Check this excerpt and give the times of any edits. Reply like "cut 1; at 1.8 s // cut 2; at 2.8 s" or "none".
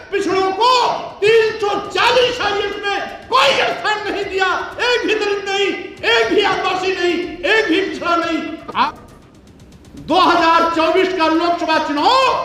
cut 1; at 8.9 s